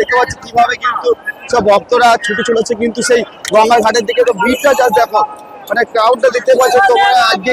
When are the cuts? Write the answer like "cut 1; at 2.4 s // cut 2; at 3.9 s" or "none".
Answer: none